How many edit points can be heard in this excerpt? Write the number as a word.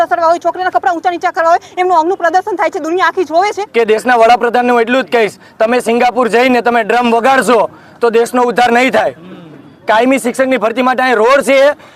one